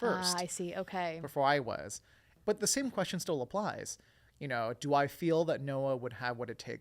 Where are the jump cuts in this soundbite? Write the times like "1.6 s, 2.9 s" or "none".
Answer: 2.3 s